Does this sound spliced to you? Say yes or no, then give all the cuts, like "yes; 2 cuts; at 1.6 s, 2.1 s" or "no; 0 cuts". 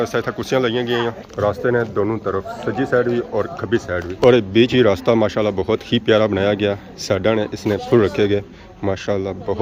no; 0 cuts